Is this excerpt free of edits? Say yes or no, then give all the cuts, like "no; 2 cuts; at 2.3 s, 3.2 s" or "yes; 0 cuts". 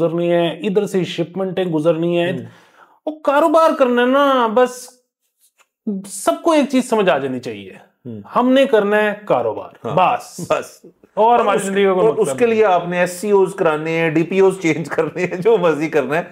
yes; 0 cuts